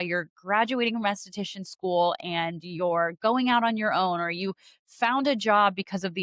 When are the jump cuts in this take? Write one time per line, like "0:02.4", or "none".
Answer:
none

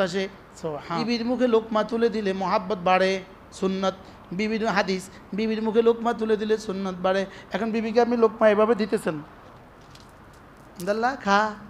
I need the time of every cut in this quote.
0:00.9

